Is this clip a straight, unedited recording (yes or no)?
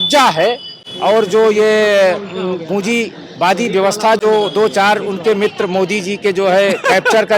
yes